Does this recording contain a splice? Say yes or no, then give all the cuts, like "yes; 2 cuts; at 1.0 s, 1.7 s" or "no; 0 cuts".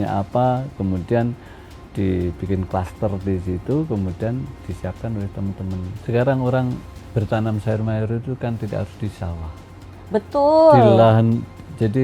yes; 1 cut; at 5.9 s